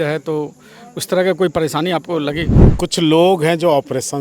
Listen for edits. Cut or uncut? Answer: cut